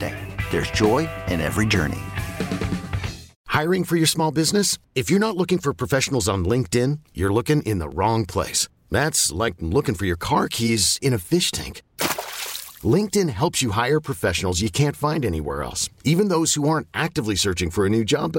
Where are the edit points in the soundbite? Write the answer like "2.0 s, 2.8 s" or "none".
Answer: 3.3 s